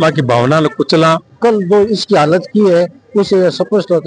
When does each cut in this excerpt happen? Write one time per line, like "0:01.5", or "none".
0:01.3